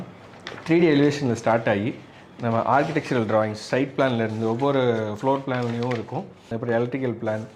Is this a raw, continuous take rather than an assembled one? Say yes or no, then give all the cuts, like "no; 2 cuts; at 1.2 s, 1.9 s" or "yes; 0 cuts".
yes; 0 cuts